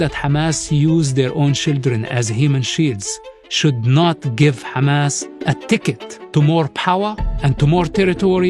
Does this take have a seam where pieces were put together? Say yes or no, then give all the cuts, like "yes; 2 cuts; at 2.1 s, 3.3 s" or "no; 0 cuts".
yes; 2 cuts; at 5.3 s, 6.1 s